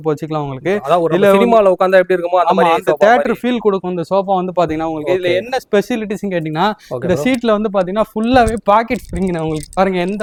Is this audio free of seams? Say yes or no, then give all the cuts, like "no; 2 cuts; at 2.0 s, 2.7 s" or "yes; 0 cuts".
yes; 0 cuts